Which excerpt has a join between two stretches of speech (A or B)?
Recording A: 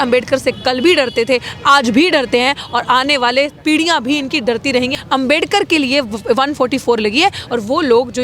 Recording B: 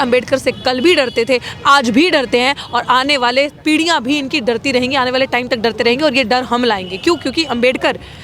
A